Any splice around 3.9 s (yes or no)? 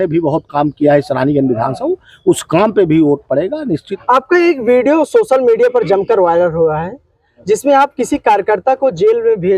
yes